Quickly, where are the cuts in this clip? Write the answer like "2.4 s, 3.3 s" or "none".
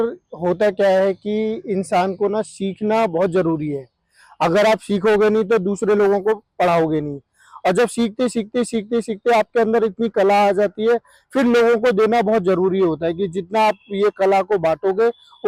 none